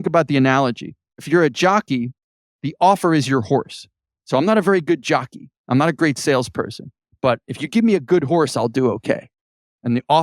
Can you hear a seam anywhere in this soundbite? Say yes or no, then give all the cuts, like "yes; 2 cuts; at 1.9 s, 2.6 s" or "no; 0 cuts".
yes; 1 cut; at 1.2 s